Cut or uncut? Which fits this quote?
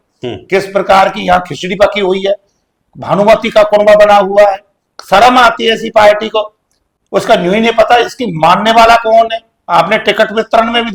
uncut